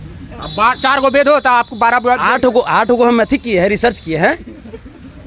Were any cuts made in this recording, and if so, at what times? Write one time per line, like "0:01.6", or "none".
none